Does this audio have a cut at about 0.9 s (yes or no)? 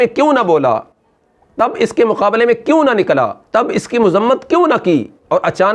no